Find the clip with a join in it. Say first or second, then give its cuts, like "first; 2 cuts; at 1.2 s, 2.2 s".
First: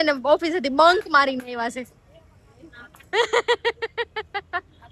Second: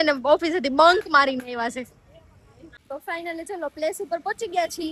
second; 1 cut; at 2.8 s